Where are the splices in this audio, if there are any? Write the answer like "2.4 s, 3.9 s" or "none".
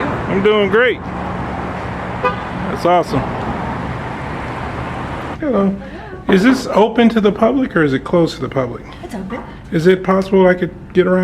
5.3 s